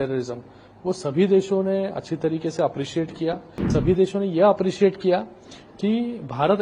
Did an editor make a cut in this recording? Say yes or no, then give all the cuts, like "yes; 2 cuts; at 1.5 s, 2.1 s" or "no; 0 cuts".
yes; 1 cut; at 3.7 s